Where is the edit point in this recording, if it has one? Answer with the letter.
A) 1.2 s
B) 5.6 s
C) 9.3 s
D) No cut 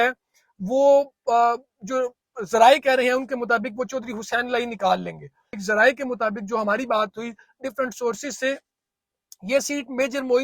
B